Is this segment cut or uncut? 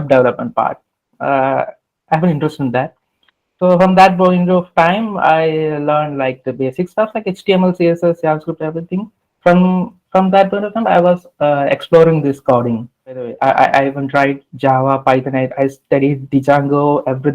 cut